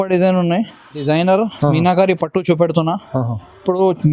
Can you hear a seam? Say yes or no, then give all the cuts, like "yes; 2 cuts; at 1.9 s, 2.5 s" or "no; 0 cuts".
yes; 1 cut; at 1.0 s